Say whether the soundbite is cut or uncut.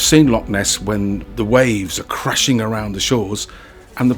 cut